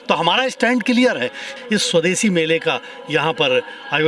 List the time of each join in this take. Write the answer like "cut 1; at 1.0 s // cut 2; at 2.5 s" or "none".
cut 1; at 1.5 s